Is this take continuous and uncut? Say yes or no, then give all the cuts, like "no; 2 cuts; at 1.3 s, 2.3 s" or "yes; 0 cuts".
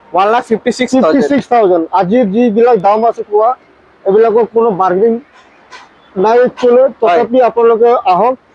yes; 0 cuts